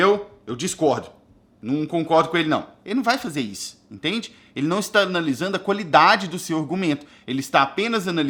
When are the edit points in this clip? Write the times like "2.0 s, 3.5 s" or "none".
none